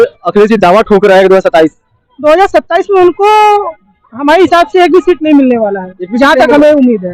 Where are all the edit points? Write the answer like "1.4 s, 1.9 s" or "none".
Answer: none